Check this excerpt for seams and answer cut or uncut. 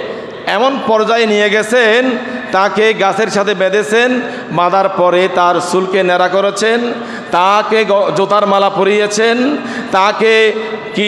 uncut